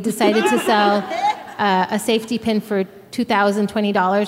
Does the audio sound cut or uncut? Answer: cut